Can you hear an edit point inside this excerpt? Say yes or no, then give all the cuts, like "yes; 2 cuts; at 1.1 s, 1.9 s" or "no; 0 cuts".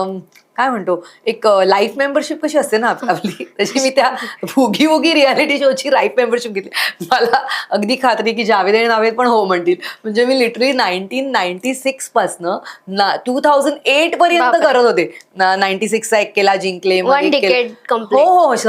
no; 0 cuts